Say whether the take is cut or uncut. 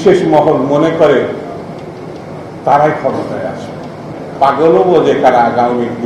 cut